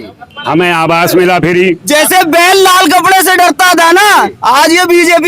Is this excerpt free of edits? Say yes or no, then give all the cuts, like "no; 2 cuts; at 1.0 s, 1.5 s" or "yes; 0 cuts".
no; 1 cut; at 1.9 s